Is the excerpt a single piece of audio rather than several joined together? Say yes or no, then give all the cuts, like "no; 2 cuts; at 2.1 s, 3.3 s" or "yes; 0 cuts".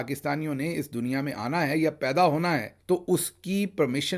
yes; 0 cuts